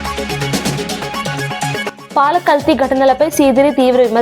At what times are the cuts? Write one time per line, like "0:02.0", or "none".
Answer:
0:01.3
0:02.0